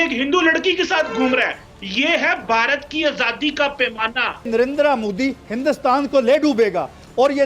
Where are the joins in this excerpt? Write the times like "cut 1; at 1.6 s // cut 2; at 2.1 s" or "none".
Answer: cut 1; at 4.5 s